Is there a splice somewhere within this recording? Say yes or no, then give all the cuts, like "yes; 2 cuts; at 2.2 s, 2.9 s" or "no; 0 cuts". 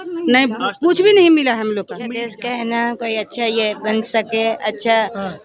yes; 1 cut; at 2.3 s